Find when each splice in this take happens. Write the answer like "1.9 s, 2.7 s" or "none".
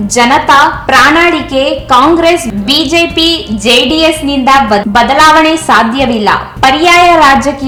none